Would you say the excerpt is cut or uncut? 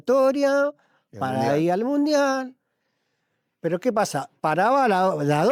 uncut